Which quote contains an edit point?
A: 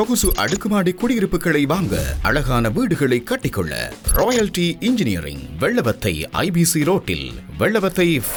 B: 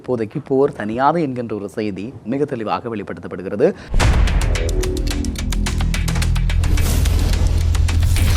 B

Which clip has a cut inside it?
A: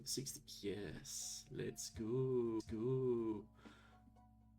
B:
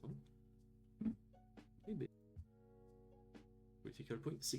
B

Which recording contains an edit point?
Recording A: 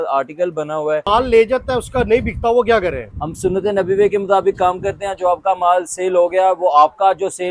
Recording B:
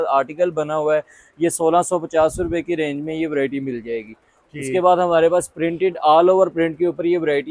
A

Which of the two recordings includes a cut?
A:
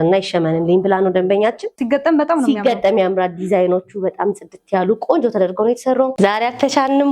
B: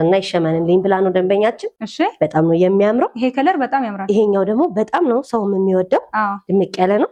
A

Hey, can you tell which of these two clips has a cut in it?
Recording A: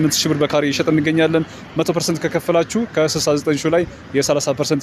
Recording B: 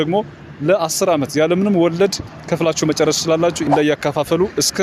B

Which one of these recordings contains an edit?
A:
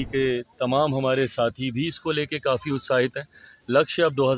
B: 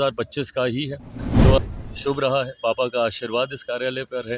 B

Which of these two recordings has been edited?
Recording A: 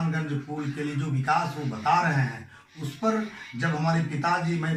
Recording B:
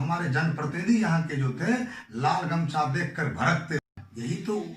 B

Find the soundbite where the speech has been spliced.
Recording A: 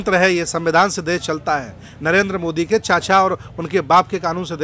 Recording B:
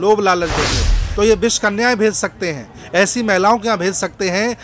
B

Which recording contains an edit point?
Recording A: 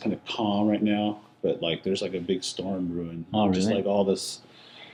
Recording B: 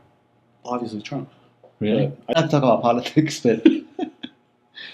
B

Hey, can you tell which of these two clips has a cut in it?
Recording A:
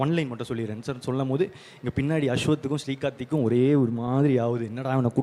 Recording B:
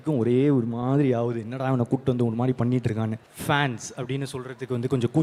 B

